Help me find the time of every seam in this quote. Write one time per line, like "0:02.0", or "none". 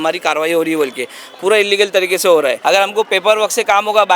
0:02.6